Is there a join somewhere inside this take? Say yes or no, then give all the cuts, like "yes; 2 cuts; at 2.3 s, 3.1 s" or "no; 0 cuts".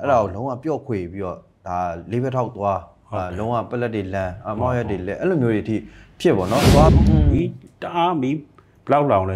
yes; 1 cut; at 6.9 s